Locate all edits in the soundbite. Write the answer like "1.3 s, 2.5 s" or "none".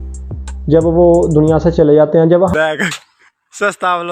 2.5 s